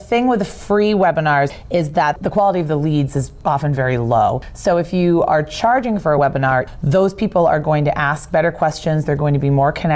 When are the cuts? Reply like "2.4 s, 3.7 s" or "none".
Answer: 1.6 s, 4.5 s, 6.7 s